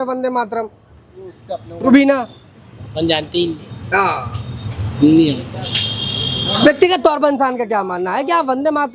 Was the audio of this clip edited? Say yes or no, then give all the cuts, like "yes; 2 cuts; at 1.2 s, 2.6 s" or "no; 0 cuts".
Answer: no; 0 cuts